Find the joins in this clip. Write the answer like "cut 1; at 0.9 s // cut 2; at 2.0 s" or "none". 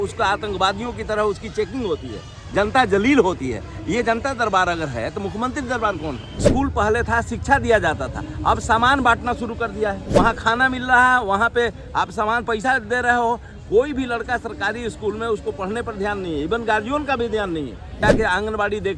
cut 1; at 6.5 s // cut 2; at 10.0 s // cut 3; at 18.0 s